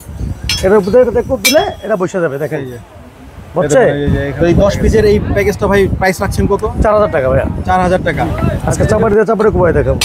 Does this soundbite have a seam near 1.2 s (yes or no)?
no